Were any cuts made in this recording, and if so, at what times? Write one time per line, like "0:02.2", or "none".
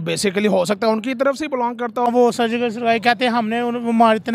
0:02.1